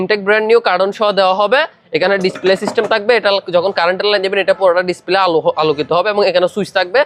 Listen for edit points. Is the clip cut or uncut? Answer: uncut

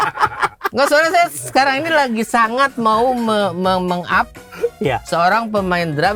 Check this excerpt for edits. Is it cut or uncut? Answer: uncut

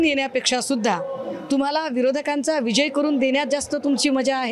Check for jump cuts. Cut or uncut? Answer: uncut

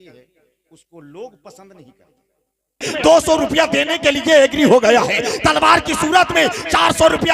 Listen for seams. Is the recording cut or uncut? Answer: cut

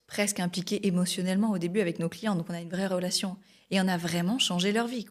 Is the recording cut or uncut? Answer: uncut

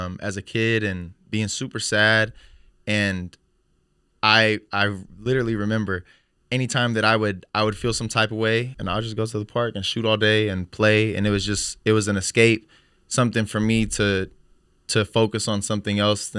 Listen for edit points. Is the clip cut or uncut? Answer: cut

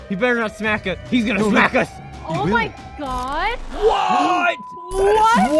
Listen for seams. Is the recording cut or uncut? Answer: uncut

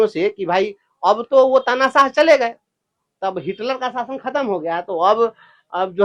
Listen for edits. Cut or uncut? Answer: uncut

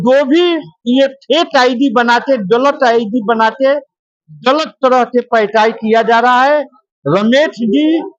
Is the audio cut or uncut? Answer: uncut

